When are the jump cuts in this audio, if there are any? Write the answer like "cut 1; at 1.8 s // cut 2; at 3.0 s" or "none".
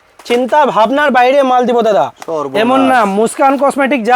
none